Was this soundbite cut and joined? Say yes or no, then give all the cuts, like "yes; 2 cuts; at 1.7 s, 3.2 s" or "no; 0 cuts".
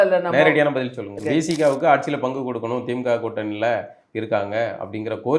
yes; 1 cut; at 1.2 s